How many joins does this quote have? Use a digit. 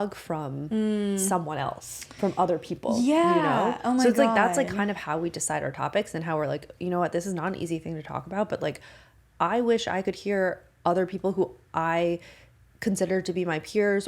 0